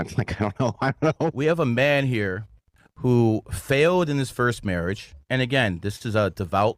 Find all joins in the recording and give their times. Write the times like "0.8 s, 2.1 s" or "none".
1.3 s